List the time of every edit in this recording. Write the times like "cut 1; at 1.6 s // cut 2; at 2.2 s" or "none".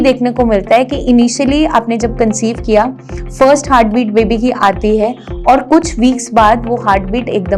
none

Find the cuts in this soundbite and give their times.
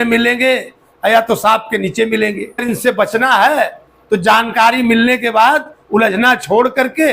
cut 1; at 2.6 s

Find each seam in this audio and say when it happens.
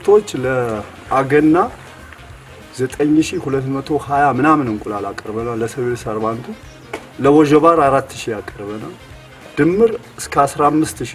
none

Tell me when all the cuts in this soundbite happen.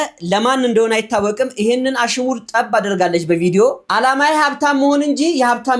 cut 1; at 3.8 s

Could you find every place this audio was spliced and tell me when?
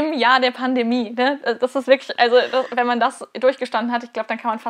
none

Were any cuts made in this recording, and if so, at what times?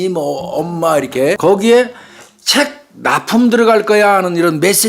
cut 1; at 1.4 s

